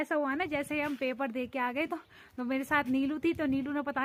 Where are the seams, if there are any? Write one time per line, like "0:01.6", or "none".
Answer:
none

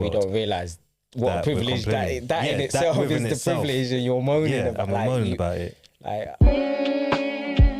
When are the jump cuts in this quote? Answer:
0:06.3

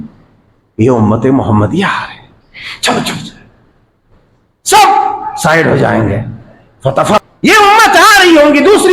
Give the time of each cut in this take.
0:07.2

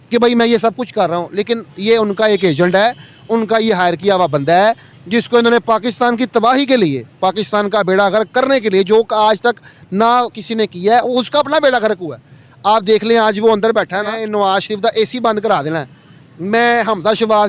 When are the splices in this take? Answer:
0:14.2

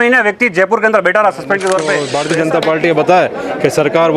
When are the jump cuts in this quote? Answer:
0:02.2

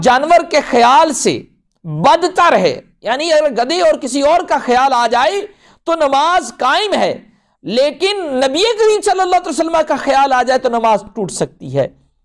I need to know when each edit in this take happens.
none

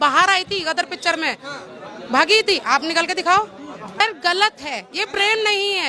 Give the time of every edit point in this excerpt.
none

